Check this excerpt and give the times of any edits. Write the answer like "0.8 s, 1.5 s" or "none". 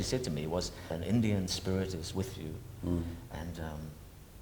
0.9 s